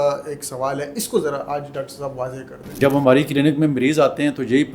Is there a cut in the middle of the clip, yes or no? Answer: yes